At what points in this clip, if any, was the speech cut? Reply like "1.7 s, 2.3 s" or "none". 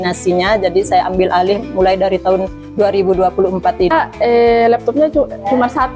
3.9 s